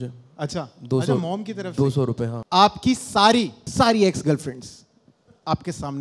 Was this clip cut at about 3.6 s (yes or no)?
yes